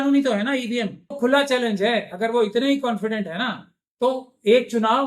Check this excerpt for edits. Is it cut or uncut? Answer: cut